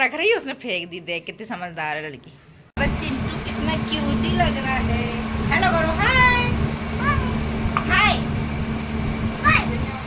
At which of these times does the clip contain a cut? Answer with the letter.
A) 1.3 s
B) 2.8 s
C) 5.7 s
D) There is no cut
B